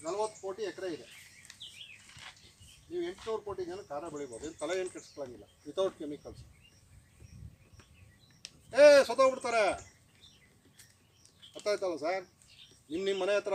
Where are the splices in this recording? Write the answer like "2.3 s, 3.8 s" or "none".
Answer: none